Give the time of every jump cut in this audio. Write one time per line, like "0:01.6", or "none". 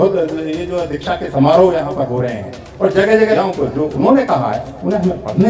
0:03.4